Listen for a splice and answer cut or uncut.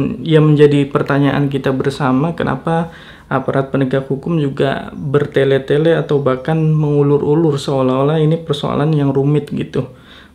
uncut